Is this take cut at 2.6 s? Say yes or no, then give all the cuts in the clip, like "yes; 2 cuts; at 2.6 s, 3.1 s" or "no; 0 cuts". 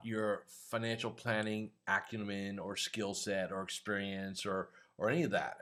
no; 0 cuts